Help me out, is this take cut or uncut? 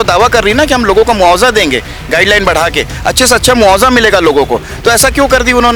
uncut